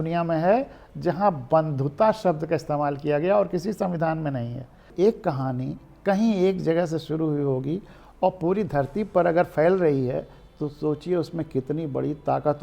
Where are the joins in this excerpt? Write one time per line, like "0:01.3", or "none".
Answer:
0:04.8